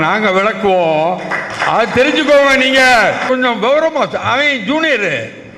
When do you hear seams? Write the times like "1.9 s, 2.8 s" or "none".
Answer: 3.2 s